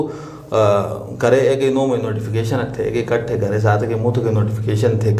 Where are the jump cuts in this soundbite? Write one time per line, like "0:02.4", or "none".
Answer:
none